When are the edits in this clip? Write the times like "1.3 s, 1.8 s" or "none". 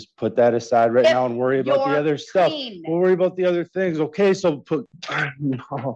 4.9 s

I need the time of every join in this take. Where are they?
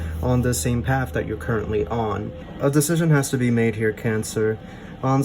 2.4 s

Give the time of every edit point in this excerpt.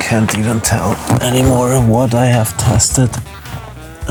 none

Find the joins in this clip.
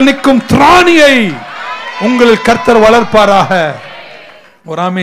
none

